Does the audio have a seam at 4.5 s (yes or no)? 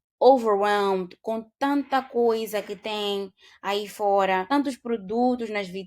yes